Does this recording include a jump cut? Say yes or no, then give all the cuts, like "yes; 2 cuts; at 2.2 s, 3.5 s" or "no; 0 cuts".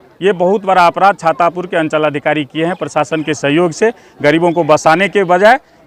no; 0 cuts